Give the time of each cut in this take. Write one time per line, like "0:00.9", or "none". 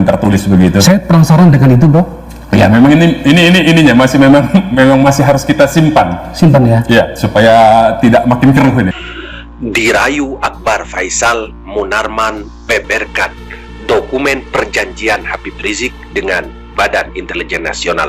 0:09.0